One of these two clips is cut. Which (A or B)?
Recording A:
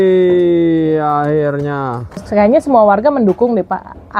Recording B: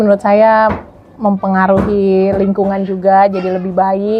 A